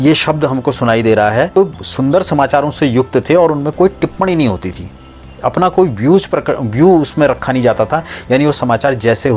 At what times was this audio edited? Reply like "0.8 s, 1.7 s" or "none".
1.6 s